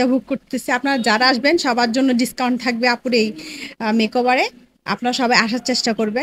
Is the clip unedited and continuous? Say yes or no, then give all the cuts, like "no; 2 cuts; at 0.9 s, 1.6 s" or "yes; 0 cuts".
yes; 0 cuts